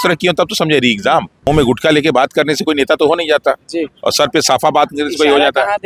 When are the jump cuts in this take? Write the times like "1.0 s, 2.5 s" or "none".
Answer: 1.5 s